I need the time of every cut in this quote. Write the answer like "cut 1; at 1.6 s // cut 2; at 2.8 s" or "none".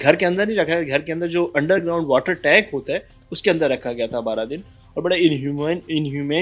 none